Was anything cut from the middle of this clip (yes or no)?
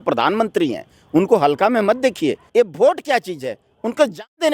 yes